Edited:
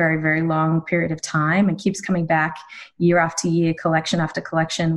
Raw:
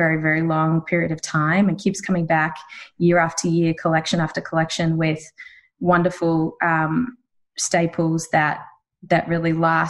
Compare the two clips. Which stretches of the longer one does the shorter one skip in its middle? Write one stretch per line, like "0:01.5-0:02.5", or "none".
none